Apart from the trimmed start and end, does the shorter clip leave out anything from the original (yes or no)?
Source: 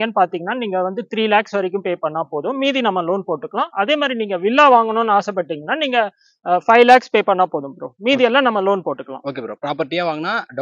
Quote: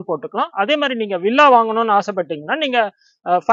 no